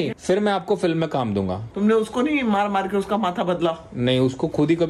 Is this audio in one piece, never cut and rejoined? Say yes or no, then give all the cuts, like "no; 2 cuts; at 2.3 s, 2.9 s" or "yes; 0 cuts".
yes; 0 cuts